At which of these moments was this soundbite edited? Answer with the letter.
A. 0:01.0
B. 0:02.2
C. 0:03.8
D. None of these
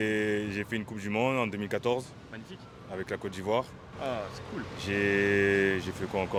D